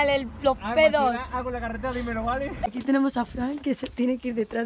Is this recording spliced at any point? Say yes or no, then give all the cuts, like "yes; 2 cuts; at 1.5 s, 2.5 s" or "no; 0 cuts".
yes; 1 cut; at 2.7 s